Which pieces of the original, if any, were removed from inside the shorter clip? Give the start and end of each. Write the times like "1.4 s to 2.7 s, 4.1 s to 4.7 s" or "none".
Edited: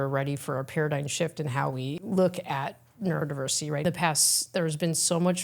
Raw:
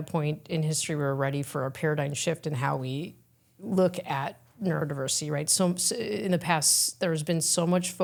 3.1 s to 3.6 s, 5.4 s to 6.3 s